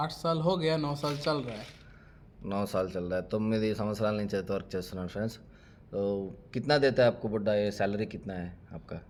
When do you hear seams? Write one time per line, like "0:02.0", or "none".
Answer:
none